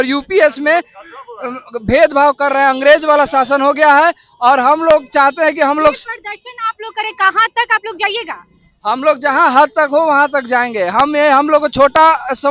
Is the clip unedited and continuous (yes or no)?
yes